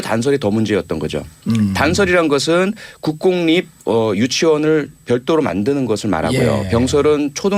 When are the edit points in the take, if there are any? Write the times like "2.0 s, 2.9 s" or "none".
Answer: none